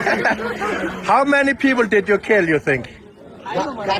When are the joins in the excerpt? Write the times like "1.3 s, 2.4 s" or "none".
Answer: none

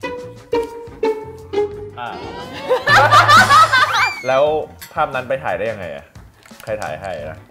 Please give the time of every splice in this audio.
4.2 s

